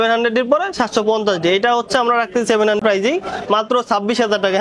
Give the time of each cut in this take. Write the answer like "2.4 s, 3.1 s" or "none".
2.8 s